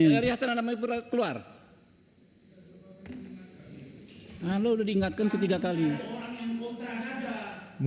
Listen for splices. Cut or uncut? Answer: uncut